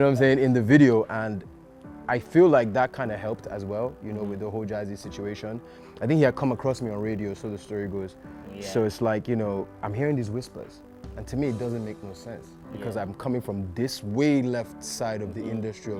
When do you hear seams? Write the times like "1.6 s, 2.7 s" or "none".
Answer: none